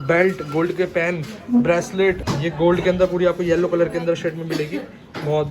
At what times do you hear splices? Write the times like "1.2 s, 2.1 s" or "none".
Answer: 2.3 s